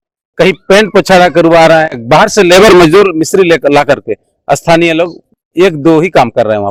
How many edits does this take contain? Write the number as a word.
zero